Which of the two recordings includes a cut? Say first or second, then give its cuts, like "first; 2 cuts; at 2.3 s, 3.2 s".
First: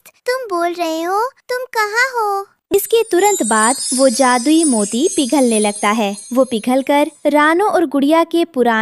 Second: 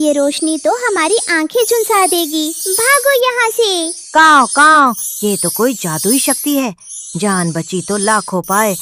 first; 1 cut; at 2.5 s